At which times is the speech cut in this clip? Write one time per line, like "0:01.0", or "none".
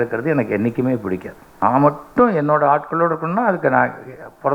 0:01.4